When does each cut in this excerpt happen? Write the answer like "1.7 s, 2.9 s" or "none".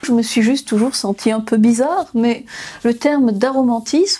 none